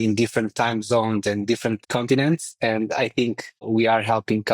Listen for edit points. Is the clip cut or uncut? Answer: cut